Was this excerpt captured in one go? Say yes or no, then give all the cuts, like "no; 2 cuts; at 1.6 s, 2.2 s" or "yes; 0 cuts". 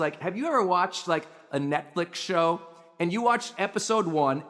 yes; 0 cuts